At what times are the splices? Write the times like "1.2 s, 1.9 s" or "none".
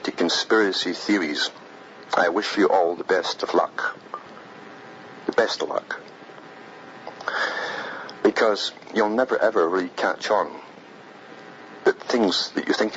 7.8 s